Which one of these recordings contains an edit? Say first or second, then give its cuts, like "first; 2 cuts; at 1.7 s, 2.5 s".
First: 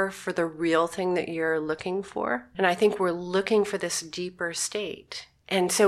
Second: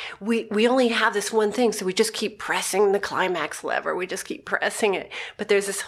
first; 1 cut; at 2.5 s